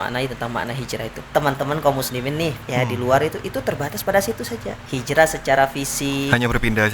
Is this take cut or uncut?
cut